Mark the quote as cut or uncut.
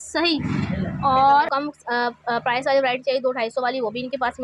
cut